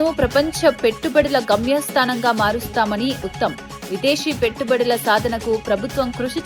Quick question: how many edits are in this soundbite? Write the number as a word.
zero